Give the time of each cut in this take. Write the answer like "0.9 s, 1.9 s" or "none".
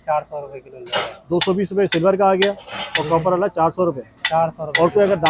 none